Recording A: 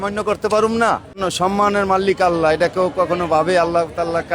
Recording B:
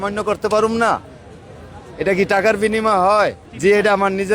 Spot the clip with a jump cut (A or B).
A